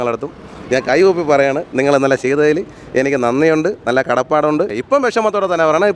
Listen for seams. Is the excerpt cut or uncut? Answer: cut